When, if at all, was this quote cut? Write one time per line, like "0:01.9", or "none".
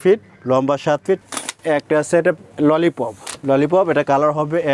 0:01.2
0:03.3